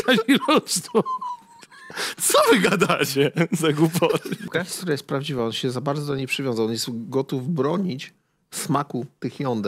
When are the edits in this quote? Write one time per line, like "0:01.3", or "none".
0:04.5